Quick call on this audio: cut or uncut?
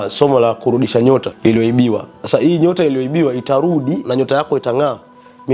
cut